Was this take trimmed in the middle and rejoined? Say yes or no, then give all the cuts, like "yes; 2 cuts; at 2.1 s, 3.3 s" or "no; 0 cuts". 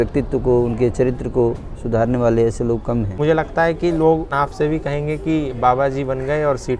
yes; 2 cuts; at 3.2 s, 4.3 s